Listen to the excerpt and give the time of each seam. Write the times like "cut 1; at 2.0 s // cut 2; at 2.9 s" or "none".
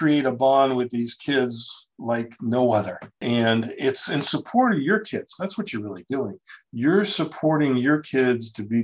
none